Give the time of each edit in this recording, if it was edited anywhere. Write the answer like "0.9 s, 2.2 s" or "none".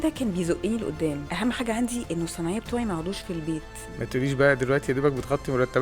1.3 s, 3.8 s